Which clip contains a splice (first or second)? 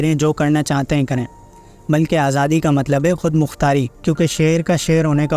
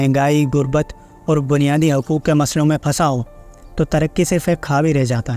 first